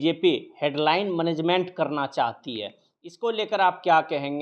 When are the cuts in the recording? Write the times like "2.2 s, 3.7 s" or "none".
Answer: none